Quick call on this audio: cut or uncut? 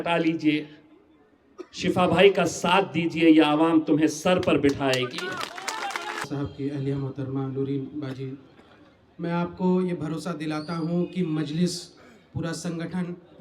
cut